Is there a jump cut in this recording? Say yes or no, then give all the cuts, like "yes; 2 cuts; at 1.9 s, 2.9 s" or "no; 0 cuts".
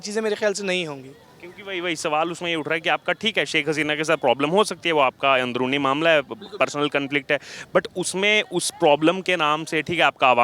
no; 0 cuts